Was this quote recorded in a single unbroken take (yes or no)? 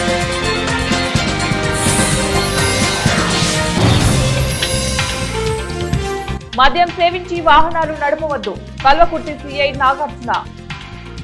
yes